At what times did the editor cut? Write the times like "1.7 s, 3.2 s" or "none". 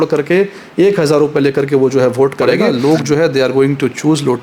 2.6 s